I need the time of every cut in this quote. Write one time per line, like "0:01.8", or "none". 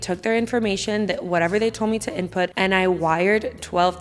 0:02.5